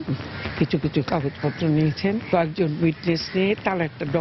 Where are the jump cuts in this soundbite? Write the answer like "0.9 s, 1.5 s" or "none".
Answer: 2.2 s